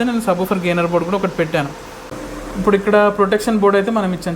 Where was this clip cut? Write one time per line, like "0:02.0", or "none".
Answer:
0:02.3